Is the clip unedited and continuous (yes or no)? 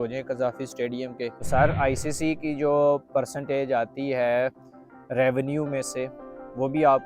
no